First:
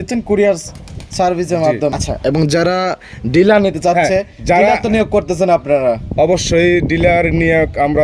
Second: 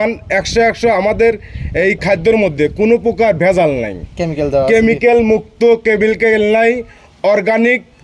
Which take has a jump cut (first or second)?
first